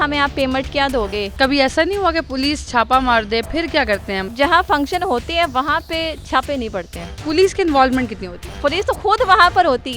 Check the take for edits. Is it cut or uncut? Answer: cut